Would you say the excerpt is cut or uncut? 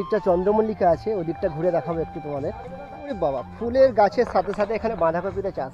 cut